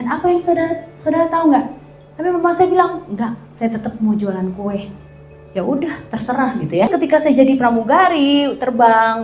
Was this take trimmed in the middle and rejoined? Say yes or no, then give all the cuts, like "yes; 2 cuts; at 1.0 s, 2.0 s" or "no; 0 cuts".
yes; 1 cut; at 6.9 s